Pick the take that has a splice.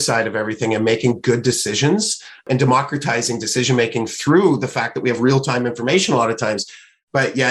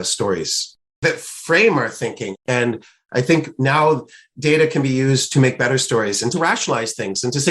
second; 2 cuts; at 1.0 s, 6.3 s

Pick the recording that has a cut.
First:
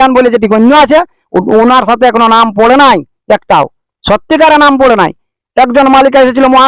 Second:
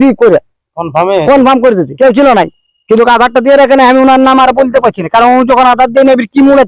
second; 1 cut; at 1.9 s

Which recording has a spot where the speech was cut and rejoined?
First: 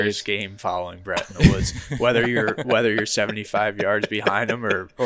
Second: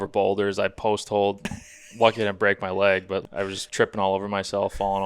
second; 2 cuts; at 1.4 s, 3.2 s

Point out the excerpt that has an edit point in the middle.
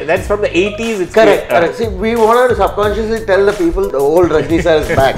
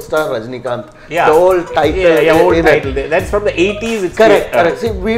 first; 1 cut; at 3.9 s

